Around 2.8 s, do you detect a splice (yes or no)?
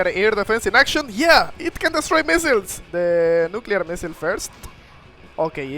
yes